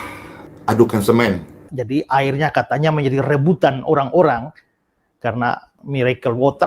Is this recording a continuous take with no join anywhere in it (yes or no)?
no